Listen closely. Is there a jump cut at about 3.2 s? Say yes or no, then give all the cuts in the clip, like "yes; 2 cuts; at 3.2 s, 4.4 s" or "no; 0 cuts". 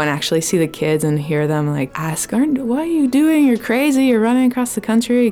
no; 1 cut; at 2.0 s